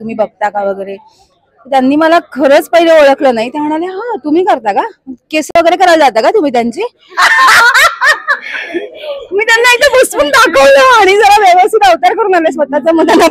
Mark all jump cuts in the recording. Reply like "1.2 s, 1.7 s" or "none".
none